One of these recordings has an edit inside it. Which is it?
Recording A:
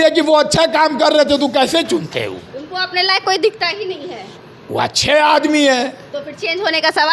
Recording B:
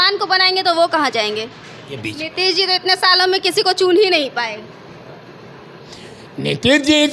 B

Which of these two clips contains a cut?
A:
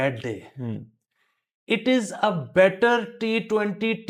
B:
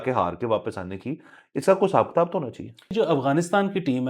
B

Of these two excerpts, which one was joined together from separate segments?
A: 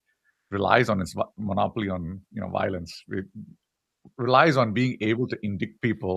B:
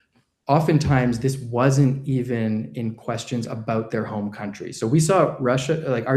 A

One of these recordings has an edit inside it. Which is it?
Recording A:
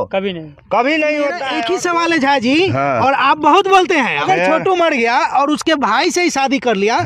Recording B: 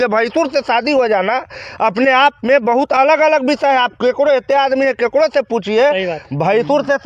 A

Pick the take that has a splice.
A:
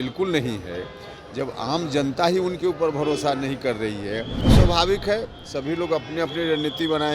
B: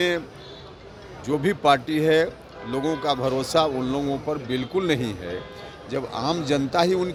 A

